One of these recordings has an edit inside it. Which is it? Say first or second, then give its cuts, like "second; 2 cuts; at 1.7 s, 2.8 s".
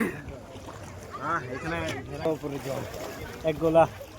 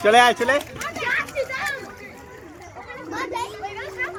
first; 1 cut; at 2.3 s